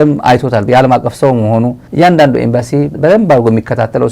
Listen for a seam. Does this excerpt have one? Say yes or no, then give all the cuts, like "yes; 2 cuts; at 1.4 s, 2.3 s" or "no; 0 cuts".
no; 0 cuts